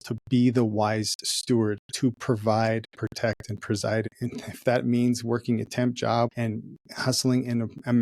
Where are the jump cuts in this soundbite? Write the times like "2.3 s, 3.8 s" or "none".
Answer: 4.1 s, 6.3 s